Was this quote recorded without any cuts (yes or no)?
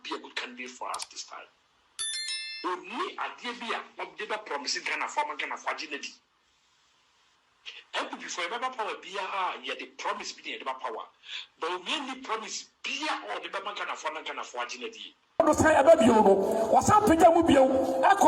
no